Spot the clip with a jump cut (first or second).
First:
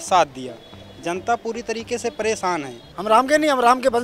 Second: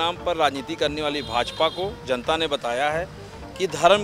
first